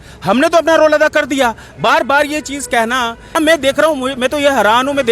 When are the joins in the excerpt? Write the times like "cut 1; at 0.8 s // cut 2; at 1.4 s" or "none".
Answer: cut 1; at 3.3 s

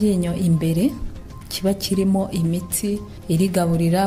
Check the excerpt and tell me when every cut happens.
none

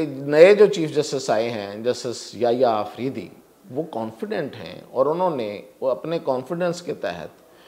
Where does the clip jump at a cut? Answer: none

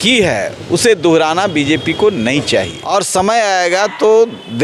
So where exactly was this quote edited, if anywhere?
cut 1; at 2.8 s

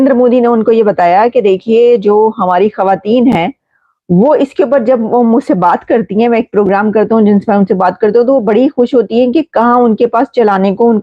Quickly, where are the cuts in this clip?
none

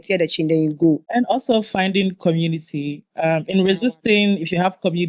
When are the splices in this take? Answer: cut 1; at 1.1 s

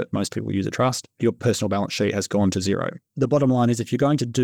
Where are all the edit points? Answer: cut 1; at 1.2 s // cut 2; at 3.0 s

